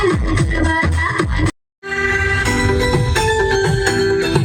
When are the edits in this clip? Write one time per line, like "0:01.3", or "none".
none